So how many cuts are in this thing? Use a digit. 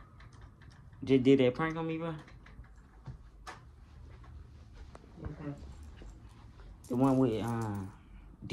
0